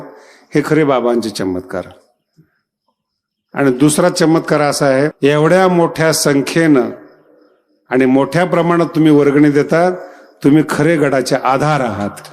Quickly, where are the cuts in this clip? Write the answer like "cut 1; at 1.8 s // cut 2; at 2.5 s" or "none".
cut 1; at 5.1 s